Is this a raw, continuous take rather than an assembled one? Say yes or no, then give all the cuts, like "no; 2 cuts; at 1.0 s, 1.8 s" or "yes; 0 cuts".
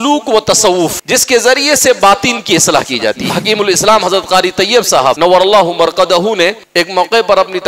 no; 4 cuts; at 1.0 s, 3.3 s, 5.2 s, 6.6 s